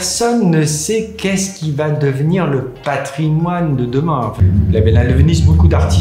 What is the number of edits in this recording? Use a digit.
1